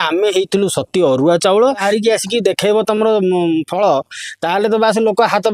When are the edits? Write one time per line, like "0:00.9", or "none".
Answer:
0:01.8